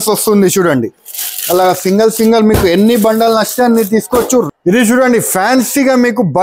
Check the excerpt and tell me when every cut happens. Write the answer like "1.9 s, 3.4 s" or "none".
4.5 s